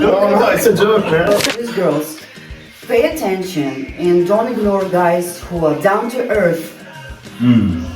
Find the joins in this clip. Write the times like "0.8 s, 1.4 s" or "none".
1.3 s